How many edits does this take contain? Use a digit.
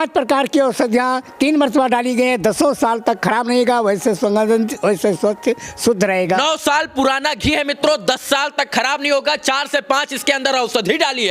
0